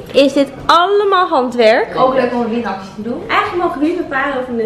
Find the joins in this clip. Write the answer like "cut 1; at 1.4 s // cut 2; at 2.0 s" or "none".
cut 1; at 1.9 s // cut 2; at 3.2 s